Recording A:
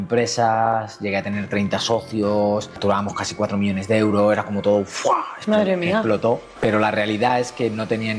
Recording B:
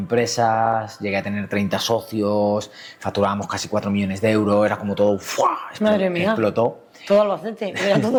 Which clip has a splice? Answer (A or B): A